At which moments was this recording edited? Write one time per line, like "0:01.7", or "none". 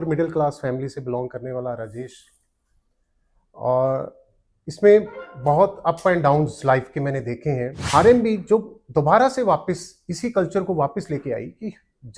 0:07.9

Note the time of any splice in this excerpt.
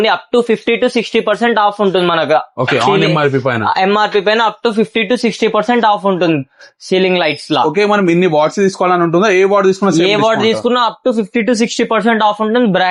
none

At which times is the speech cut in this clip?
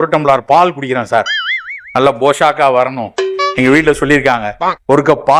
none

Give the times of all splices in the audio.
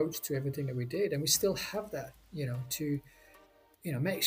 none

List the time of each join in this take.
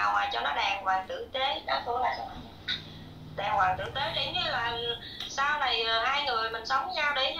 none

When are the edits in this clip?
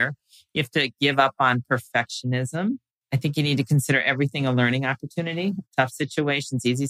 0:02.9
0:05.7

